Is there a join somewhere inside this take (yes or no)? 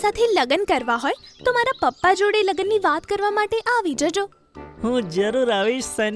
no